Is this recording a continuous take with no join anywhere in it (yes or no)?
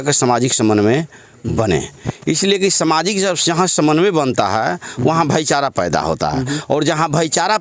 yes